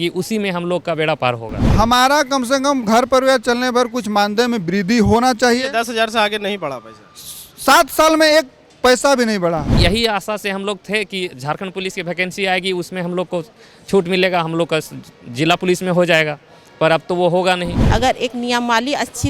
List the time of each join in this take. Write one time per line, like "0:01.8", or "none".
0:01.6
0:09.7
0:17.7